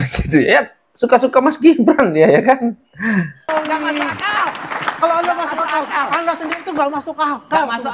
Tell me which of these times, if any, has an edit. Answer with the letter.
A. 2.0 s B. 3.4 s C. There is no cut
B